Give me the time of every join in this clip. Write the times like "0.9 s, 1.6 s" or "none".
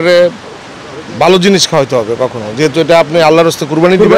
none